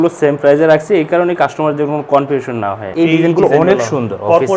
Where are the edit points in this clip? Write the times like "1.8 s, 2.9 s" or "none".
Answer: 2.8 s